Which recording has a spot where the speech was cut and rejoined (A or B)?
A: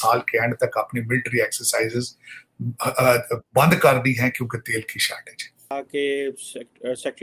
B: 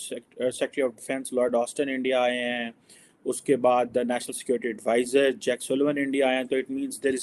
A